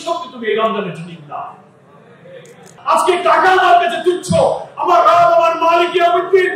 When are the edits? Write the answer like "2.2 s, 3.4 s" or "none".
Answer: 2.8 s